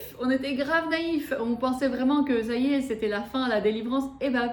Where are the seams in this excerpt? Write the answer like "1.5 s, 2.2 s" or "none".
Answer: none

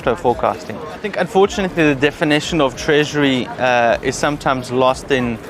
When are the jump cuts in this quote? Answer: 1.1 s

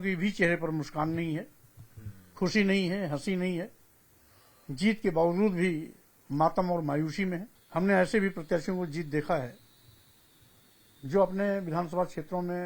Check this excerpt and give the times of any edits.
7.5 s

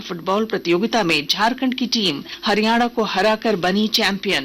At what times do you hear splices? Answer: 2.3 s

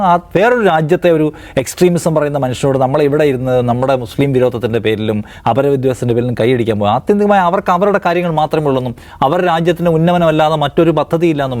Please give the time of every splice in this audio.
none

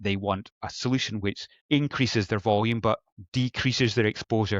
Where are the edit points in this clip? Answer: 1.5 s, 3.2 s

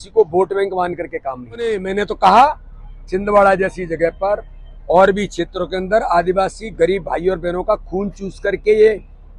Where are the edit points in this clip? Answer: 1.8 s

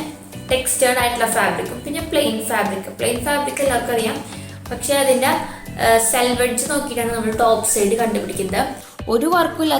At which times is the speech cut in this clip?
8.8 s

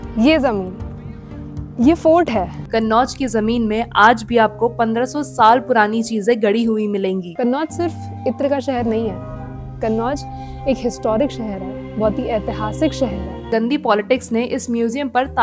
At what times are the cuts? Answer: 2.6 s, 7.3 s, 13.5 s

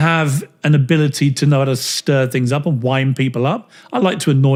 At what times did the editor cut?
none

